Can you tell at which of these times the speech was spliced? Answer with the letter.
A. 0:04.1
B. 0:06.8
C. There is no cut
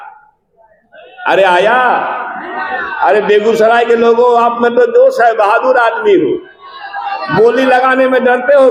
C